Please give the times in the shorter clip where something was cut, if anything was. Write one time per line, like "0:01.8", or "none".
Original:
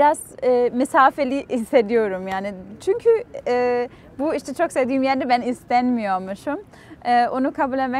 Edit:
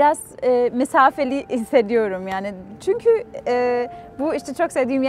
none